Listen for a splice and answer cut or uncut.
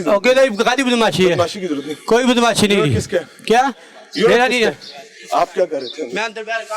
uncut